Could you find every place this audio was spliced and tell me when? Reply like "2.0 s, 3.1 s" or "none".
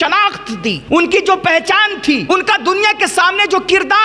0.8 s, 2.2 s